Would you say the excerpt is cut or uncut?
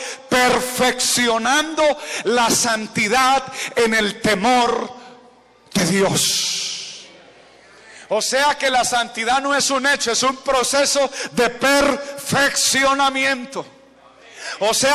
uncut